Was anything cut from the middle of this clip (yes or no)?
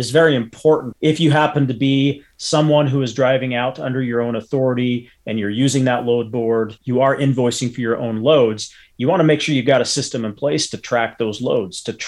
yes